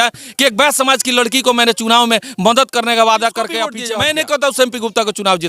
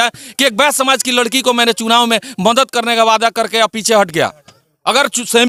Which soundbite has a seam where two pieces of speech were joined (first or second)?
first